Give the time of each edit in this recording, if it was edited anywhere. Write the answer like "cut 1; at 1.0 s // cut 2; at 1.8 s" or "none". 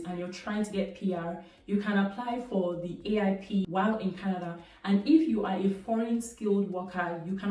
none